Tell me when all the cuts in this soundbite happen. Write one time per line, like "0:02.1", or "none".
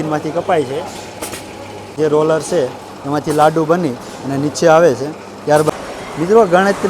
0:01.9
0:05.7